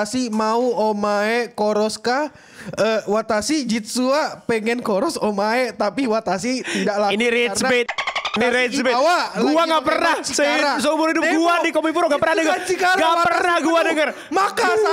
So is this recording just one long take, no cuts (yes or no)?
yes